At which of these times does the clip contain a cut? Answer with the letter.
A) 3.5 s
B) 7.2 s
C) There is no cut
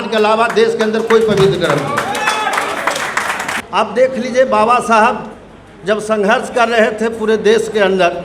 A